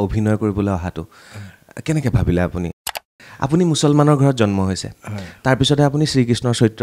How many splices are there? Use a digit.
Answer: 1